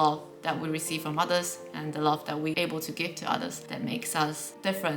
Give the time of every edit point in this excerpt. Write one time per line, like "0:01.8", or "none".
0:02.5
0:03.6